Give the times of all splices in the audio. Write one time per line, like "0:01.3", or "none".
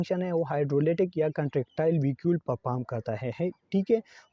none